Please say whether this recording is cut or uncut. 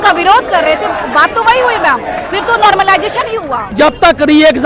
cut